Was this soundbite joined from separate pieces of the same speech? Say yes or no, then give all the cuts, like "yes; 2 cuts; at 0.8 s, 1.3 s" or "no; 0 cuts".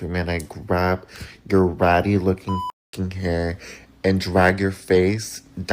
no; 0 cuts